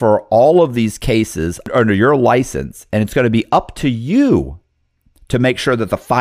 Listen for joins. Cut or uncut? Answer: cut